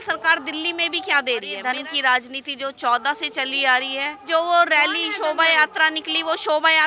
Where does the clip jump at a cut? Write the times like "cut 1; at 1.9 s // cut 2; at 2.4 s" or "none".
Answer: cut 1; at 1.5 s // cut 2; at 4.2 s